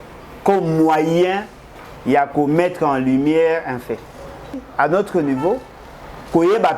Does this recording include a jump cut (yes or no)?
yes